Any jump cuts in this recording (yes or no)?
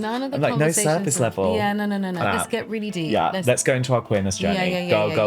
yes